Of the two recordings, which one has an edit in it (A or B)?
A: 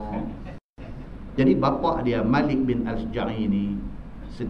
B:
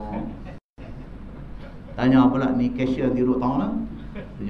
B